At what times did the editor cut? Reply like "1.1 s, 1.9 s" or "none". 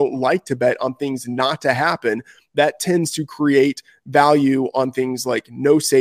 none